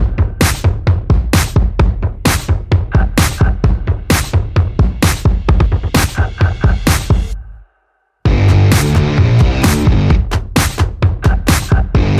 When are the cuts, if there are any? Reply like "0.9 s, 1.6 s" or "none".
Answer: none